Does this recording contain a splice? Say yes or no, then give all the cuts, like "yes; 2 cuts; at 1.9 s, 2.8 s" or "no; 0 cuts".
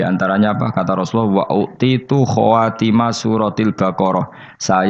no; 0 cuts